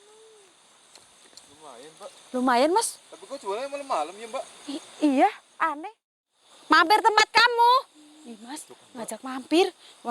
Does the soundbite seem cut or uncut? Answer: cut